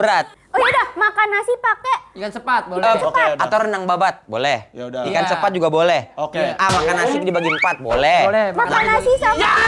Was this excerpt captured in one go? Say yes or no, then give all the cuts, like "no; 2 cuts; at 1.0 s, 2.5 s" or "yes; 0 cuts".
yes; 0 cuts